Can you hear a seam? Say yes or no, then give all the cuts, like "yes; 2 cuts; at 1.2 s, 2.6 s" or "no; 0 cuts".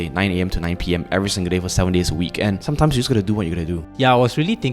yes; 2 cuts; at 2.6 s, 3.9 s